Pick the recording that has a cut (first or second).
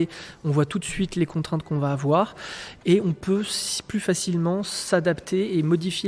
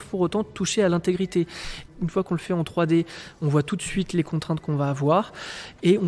second